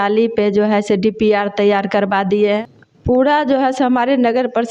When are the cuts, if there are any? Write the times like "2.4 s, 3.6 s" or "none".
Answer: 2.6 s